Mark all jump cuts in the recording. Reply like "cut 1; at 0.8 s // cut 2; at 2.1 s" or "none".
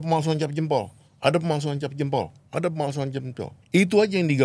cut 1; at 3.5 s